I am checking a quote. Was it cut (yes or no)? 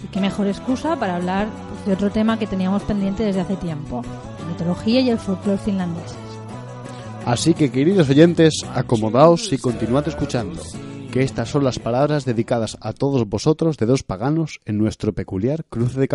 no